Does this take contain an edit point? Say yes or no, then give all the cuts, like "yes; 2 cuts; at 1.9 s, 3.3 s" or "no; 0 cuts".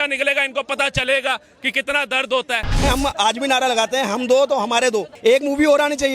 yes; 2 cuts; at 2.8 s, 5.1 s